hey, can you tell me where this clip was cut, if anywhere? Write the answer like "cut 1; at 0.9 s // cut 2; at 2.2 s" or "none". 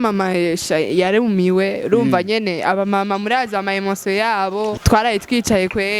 cut 1; at 4.7 s